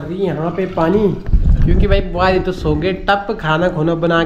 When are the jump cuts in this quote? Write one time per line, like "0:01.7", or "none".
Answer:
none